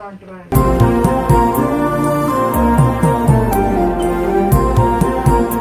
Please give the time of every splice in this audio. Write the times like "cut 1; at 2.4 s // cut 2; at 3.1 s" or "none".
none